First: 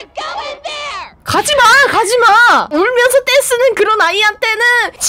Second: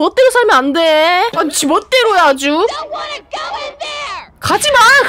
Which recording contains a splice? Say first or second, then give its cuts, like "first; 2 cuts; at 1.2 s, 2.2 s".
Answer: second; 1 cut; at 1.3 s